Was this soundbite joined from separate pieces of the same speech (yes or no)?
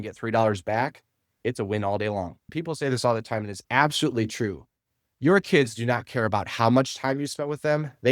yes